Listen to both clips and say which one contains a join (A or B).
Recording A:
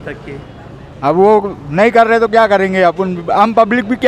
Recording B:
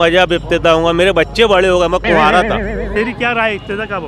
B